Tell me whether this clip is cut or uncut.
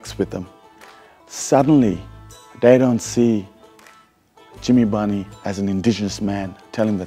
uncut